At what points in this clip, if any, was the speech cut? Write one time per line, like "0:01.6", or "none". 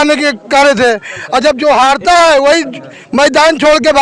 none